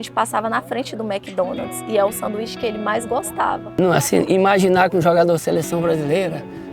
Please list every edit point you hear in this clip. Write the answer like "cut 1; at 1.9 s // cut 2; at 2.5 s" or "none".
cut 1; at 3.8 s